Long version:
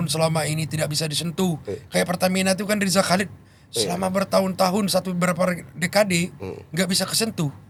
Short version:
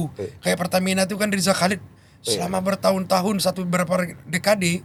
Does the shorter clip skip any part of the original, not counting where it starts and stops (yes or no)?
no